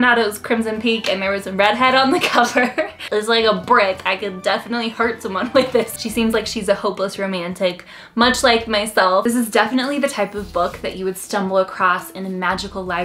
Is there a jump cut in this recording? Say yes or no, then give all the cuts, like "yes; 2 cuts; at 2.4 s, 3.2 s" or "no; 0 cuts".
yes; 3 cuts; at 3.0 s, 5.9 s, 9.2 s